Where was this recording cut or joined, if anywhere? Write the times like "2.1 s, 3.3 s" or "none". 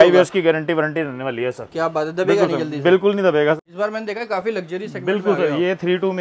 3.6 s